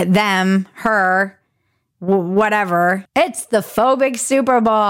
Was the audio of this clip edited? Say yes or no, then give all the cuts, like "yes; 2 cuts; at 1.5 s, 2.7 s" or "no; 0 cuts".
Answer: yes; 1 cut; at 3.0 s